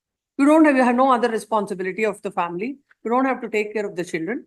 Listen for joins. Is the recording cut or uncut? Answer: uncut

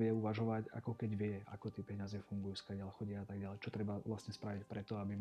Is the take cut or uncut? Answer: uncut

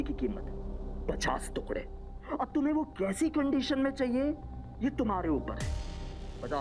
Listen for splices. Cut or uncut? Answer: uncut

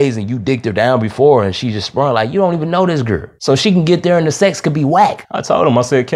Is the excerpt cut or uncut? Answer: cut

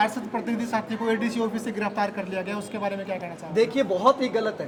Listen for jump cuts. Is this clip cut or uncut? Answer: uncut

